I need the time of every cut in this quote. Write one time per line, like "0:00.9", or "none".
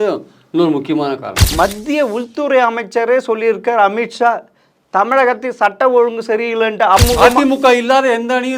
0:01.5
0:07.0